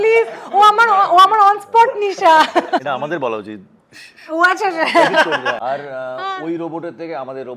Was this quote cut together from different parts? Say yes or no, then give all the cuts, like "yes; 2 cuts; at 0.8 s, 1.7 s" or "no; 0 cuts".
yes; 2 cuts; at 2.8 s, 5.6 s